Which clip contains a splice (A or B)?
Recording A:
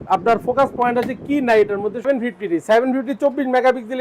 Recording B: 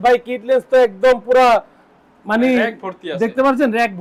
A